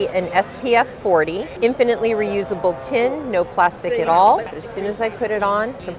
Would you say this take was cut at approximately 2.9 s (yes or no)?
no